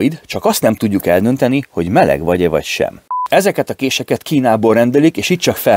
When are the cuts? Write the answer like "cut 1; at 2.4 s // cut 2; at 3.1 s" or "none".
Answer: cut 1; at 3.1 s